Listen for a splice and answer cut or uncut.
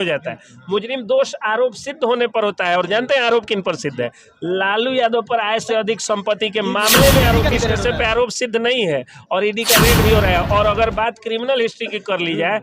cut